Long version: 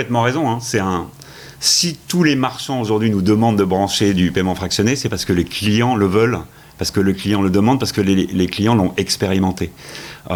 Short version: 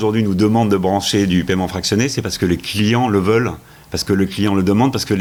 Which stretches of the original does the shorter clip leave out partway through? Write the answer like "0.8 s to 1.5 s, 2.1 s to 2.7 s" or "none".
none